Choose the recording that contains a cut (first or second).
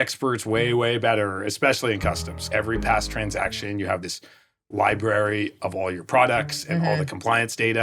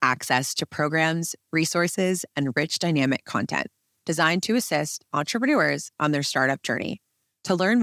first